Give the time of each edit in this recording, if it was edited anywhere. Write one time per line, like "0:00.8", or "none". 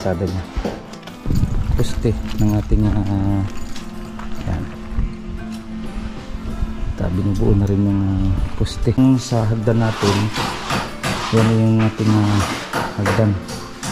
0:01.2
0:09.0